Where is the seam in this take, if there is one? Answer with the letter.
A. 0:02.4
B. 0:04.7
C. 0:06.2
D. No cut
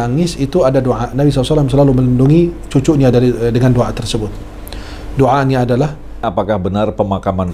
C